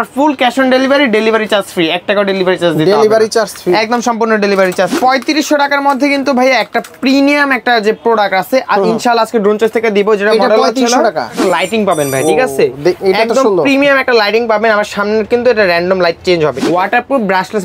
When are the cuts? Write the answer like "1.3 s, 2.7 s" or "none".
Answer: 4.9 s, 11.4 s, 16.6 s